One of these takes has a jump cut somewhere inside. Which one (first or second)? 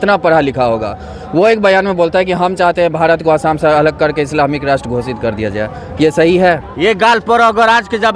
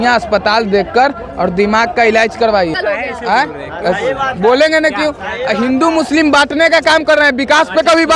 first